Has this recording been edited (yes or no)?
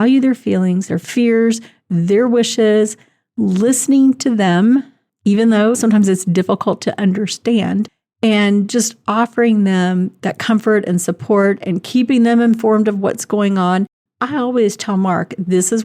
yes